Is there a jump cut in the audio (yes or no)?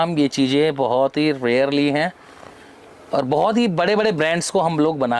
no